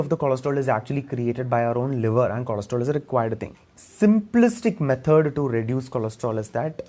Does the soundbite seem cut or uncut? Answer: cut